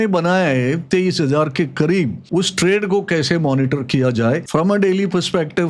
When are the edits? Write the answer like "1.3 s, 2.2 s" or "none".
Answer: 2.2 s, 4.4 s